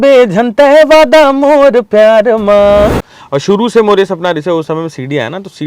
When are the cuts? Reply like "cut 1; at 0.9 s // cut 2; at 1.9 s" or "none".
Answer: cut 1; at 3.1 s